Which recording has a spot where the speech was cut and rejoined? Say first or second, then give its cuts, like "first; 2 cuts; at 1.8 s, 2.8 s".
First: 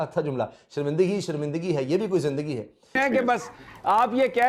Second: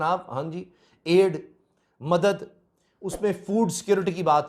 first; 1 cut; at 3.0 s